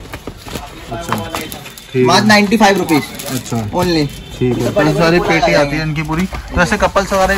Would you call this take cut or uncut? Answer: uncut